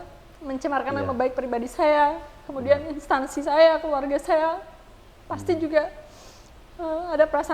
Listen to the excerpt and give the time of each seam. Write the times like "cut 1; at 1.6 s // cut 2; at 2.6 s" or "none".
none